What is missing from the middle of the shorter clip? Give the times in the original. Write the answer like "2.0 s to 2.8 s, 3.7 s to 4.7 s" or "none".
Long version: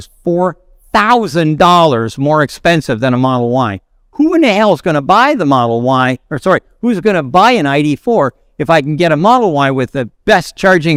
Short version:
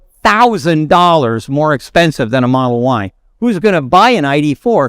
4.0 s to 6.7 s